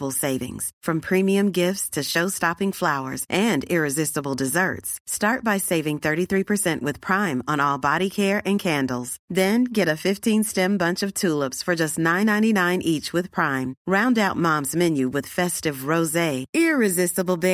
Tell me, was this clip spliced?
no; 0 cuts

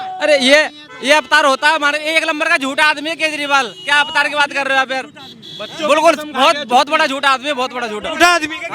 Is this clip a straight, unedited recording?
yes; 0 cuts

